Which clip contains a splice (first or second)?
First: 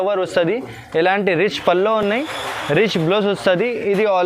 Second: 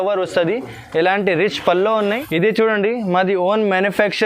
second